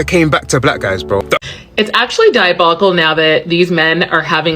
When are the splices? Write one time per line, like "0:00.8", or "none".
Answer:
0:01.4